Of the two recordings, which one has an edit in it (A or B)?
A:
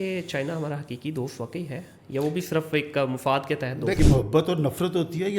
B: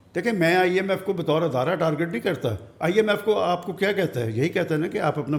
A